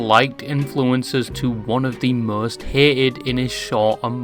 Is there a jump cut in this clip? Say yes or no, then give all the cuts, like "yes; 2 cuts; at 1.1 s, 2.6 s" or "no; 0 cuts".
no; 0 cuts